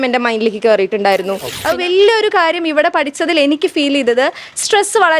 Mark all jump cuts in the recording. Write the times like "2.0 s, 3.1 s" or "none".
1.5 s